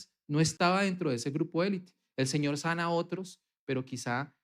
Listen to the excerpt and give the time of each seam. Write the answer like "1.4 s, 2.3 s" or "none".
none